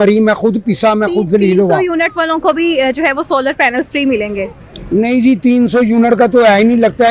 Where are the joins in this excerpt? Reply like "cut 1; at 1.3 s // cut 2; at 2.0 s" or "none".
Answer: none